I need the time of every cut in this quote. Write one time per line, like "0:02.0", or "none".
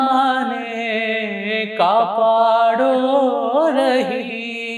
none